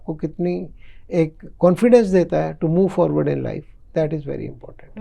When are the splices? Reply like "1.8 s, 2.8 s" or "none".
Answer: none